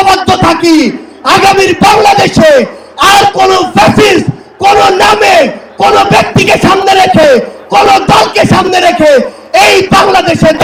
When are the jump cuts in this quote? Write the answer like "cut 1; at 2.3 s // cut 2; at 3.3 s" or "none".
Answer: none